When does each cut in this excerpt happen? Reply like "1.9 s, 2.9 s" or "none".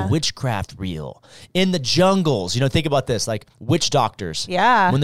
none

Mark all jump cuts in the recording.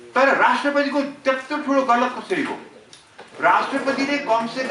none

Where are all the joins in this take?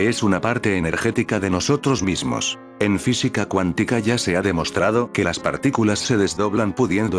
2.6 s

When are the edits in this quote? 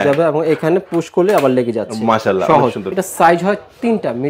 2.9 s

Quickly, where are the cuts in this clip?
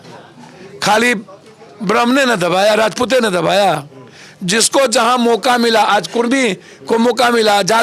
none

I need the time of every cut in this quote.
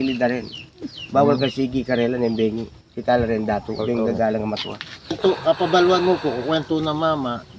5.2 s

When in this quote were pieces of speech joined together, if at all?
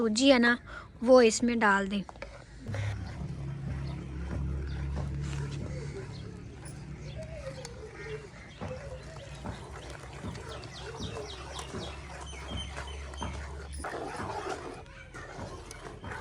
2.8 s

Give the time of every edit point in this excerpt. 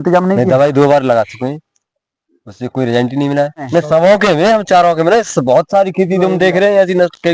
3.7 s

